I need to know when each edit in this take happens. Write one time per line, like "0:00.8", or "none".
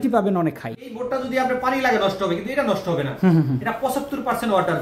0:00.9